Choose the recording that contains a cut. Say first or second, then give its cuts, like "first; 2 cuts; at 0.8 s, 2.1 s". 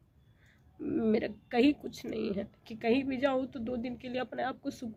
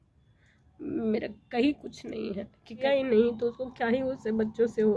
second; 1 cut; at 2.8 s